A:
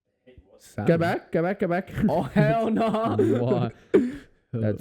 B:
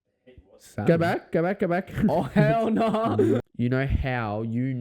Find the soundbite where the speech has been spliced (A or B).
B